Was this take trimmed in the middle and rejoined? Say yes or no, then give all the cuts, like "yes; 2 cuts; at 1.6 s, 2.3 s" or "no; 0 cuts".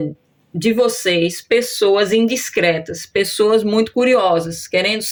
no; 0 cuts